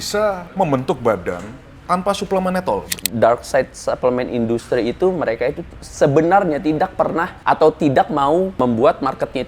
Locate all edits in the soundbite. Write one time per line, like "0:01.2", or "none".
0:03.0
0:07.3
0:08.6